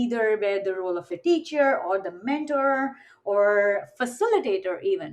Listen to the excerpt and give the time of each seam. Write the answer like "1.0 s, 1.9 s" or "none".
1.1 s